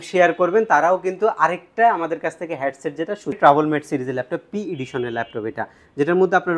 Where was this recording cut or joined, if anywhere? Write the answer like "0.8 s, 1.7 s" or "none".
3.4 s